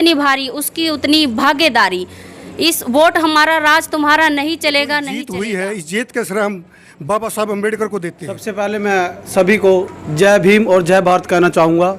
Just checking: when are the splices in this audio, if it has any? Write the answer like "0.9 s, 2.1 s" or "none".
5.2 s, 8.5 s